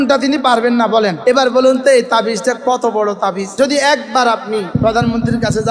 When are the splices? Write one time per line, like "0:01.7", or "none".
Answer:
0:01.2
0:03.5
0:04.7